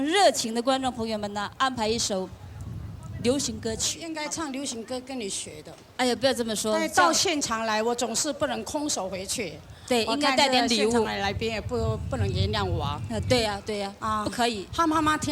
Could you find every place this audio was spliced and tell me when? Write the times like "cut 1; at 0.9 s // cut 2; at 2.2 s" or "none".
cut 1; at 4.1 s